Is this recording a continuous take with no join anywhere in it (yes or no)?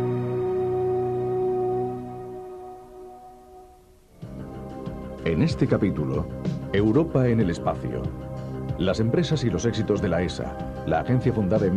no